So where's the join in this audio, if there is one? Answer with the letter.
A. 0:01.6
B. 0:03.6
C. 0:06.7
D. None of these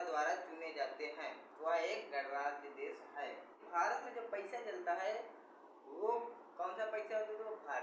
B